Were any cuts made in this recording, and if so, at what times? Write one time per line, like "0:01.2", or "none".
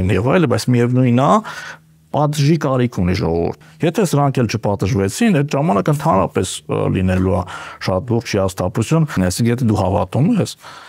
0:03.6
0:09.1